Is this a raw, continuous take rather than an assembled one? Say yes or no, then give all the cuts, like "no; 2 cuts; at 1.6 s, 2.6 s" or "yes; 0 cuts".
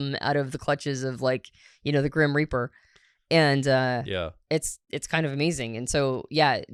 yes; 0 cuts